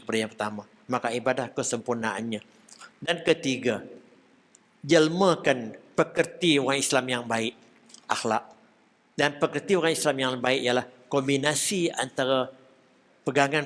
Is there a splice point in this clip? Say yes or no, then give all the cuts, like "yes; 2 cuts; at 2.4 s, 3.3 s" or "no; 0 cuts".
no; 0 cuts